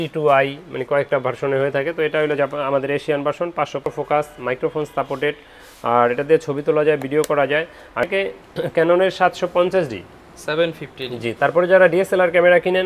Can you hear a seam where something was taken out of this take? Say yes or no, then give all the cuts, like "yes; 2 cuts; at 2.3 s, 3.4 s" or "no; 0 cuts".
yes; 2 cuts; at 3.9 s, 8.0 s